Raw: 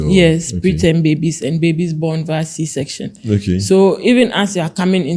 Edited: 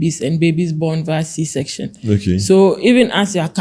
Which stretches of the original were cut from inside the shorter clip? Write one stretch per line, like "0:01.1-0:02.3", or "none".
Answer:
none